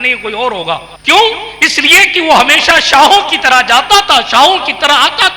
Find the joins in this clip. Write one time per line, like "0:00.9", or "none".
0:00.9